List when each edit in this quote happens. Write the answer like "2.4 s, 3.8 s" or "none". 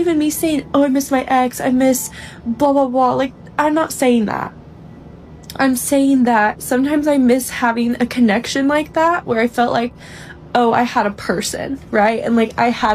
none